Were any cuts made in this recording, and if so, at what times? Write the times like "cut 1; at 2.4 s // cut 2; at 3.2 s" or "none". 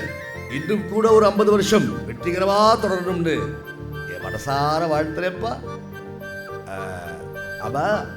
none